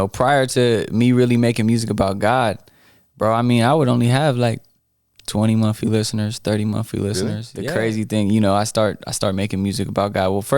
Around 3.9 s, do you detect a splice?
no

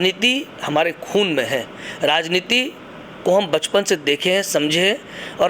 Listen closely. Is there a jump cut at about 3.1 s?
no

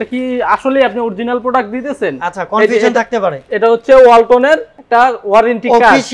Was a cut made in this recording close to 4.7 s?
yes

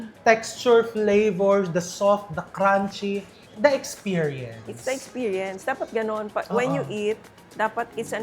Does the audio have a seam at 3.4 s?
yes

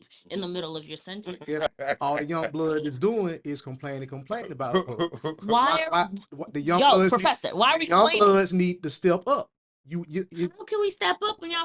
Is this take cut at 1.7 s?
yes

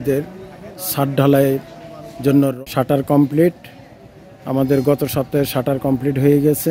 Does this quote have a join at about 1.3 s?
no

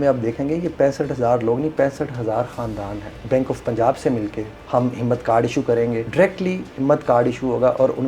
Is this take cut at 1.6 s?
no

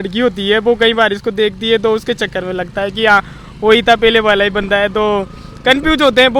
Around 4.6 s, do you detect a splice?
no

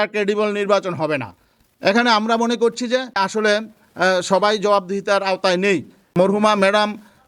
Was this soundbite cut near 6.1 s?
yes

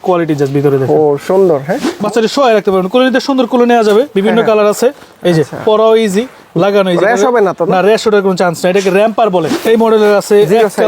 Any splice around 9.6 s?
yes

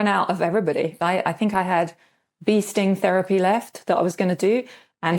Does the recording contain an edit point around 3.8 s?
no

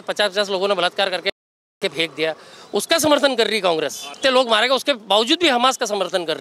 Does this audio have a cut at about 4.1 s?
yes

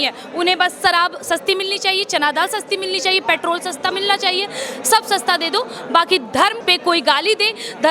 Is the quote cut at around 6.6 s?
yes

